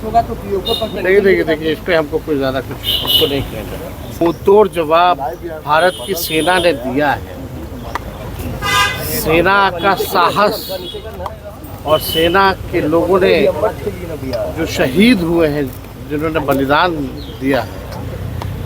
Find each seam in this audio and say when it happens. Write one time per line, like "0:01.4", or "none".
0:00.9
0:04.2